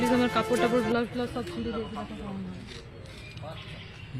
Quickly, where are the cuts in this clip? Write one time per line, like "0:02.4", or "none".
none